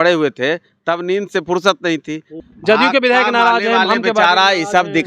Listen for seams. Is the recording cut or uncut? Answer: cut